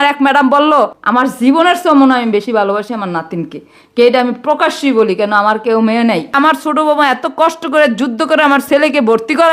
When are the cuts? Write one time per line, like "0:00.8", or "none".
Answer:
0:01.0
0:06.3